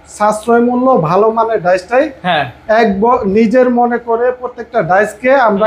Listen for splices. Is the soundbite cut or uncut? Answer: uncut